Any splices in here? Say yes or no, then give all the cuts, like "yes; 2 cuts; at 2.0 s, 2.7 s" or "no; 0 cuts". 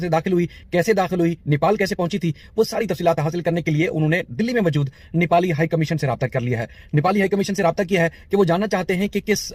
no; 0 cuts